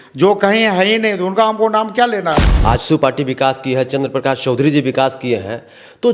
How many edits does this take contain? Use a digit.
1